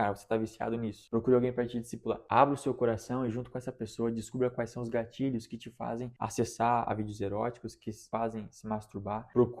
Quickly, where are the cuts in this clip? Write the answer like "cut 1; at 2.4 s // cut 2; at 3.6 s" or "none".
cut 1; at 6.1 s // cut 2; at 8.0 s